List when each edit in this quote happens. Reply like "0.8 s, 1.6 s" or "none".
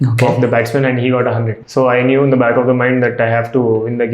1.6 s